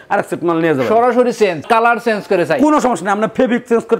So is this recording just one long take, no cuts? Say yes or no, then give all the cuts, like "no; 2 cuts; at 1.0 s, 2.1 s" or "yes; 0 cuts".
no; 1 cut; at 1.6 s